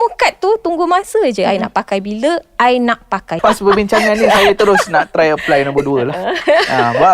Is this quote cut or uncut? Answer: cut